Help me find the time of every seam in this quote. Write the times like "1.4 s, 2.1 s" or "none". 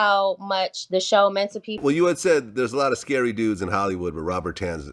1.7 s